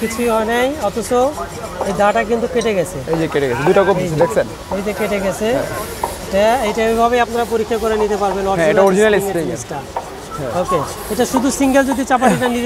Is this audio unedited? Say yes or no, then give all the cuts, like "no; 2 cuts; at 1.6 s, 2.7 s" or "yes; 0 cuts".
yes; 0 cuts